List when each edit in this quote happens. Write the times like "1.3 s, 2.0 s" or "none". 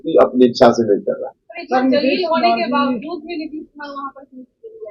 none